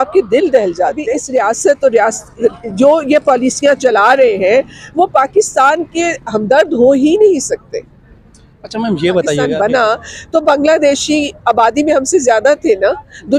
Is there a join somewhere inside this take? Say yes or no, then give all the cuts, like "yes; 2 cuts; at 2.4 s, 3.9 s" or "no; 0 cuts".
yes; 2 cuts; at 1.1 s, 9.5 s